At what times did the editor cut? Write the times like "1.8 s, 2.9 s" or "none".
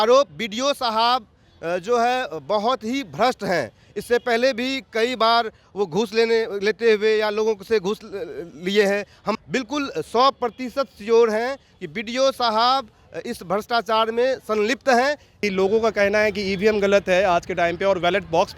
9.3 s, 15.4 s